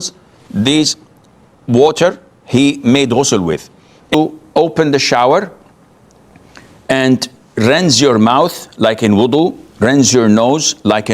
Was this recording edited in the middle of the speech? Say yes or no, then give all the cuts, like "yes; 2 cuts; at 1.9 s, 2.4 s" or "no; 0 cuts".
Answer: yes; 1 cut; at 4.1 s